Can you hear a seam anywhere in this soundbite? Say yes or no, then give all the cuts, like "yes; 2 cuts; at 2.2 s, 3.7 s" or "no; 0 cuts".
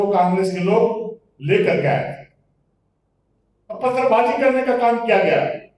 no; 0 cuts